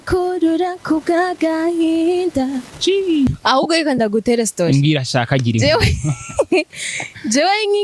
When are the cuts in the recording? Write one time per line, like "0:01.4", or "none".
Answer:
0:03.3